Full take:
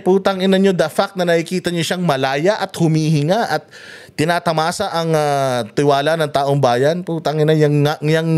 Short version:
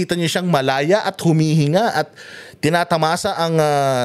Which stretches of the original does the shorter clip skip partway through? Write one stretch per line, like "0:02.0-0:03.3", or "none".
none